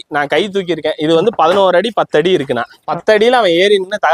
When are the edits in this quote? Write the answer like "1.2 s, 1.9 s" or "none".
none